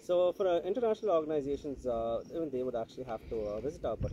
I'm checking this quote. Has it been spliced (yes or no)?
no